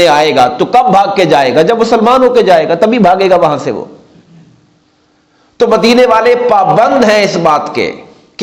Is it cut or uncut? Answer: uncut